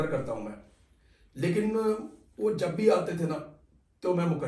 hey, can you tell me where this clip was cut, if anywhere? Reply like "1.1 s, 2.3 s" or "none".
none